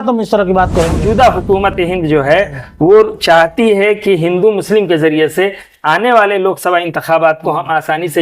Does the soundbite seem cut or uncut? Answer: cut